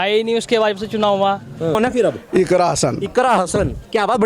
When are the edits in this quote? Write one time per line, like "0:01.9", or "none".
0:01.7